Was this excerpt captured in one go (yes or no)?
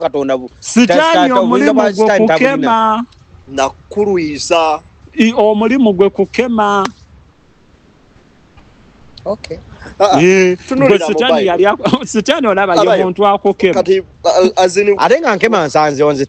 yes